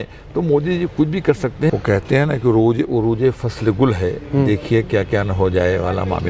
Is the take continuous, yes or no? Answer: no